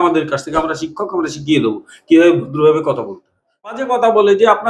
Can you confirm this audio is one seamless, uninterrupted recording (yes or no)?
no